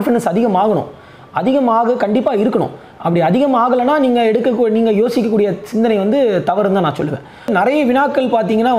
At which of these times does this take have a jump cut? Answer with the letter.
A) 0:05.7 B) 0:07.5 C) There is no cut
B